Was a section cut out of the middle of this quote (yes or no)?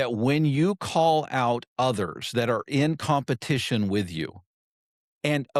no